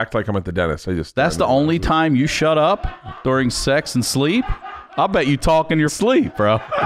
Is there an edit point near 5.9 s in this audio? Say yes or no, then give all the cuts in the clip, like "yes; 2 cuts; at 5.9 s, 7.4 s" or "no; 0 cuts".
yes; 1 cut; at 5.9 s